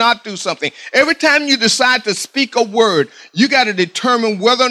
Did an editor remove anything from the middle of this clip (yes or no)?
no